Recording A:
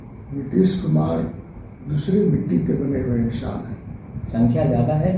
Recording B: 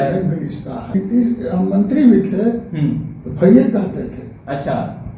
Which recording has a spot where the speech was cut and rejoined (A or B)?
B